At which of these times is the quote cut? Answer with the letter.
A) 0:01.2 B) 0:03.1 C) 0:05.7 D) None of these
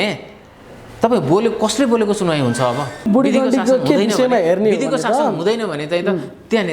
B